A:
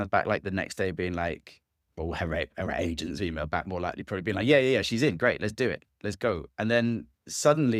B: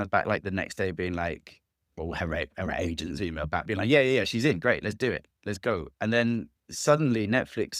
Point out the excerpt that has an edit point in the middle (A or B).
B